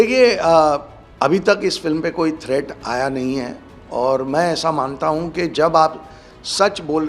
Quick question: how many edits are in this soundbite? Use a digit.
1